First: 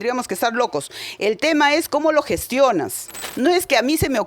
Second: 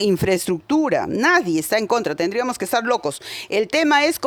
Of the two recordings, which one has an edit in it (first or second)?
first